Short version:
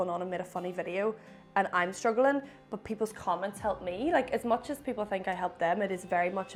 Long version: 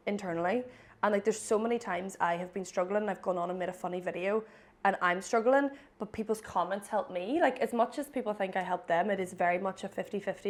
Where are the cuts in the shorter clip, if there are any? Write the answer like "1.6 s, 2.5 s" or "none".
none